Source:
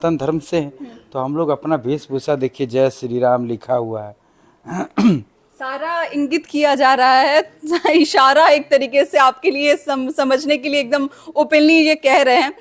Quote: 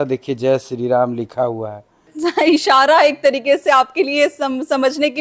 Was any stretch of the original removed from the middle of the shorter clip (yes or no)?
yes